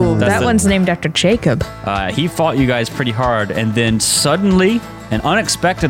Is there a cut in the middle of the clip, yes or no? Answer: yes